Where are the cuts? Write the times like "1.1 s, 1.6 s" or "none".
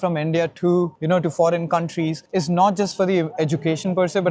none